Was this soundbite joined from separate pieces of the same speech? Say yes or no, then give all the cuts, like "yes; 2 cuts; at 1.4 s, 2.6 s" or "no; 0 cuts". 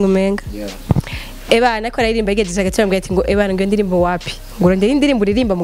no; 0 cuts